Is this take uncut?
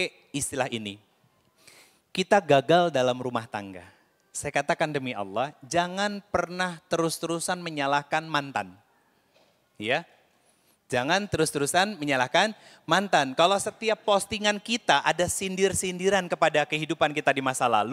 yes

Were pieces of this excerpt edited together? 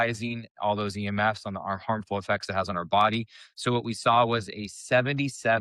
no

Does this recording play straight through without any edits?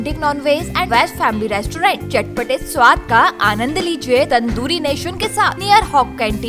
no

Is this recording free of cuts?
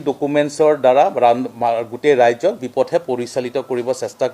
no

